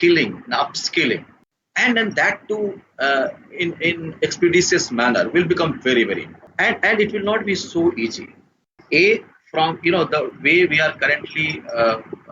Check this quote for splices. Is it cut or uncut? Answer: cut